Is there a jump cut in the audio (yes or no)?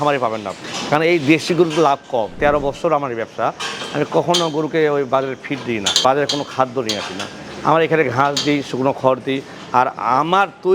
yes